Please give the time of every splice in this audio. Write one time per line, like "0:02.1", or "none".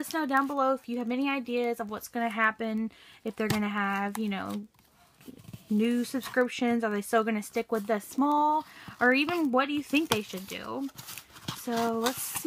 0:09.3